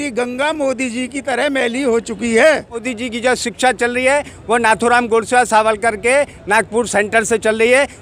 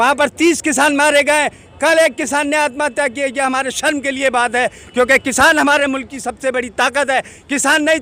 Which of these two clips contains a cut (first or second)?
first